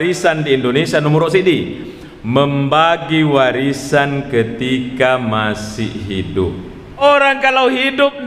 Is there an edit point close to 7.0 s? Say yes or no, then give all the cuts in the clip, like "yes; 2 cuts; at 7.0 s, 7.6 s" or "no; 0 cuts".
yes; 1 cut; at 7.0 s